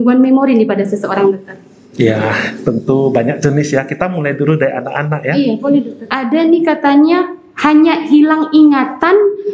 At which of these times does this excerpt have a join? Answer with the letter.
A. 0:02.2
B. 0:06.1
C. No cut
B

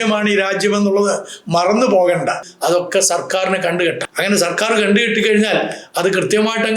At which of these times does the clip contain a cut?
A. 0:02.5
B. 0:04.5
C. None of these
A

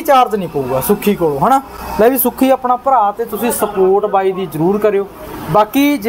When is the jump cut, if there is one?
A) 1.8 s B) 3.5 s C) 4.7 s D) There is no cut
D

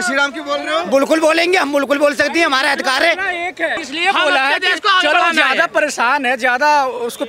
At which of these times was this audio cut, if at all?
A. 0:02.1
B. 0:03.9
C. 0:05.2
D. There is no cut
B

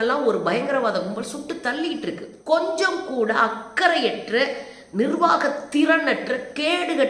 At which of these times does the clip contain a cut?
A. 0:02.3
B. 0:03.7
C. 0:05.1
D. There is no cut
A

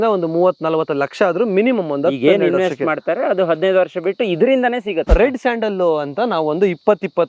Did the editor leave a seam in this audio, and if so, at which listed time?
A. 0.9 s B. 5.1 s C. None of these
B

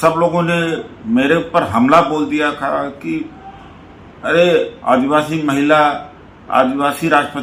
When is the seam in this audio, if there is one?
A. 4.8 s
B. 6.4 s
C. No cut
C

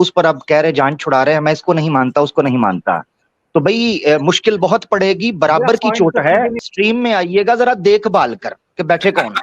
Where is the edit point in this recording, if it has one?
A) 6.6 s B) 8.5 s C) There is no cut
A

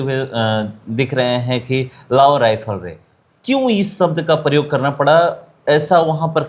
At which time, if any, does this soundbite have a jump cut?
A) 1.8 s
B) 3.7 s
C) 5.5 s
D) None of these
D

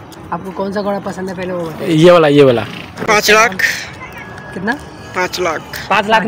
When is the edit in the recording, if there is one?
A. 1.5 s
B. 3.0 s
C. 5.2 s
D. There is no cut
B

